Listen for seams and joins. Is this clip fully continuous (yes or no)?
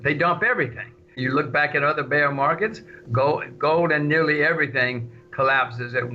no